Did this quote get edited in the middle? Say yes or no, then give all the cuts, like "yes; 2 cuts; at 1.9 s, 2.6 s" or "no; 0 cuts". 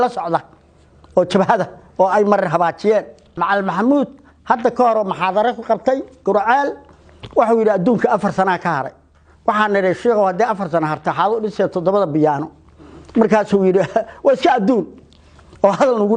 yes; 1 cut; at 3.3 s